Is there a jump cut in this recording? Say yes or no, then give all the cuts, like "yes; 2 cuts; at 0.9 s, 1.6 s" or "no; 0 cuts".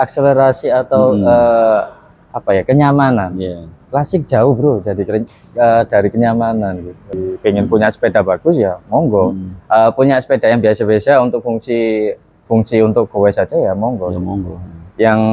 yes; 1 cut; at 7.2 s